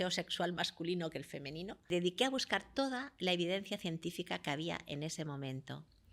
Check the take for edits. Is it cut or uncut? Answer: cut